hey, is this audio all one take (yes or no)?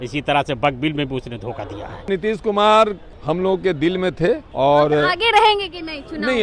no